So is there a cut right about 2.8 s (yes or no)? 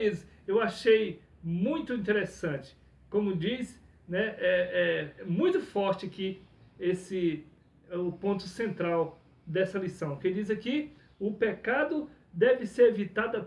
no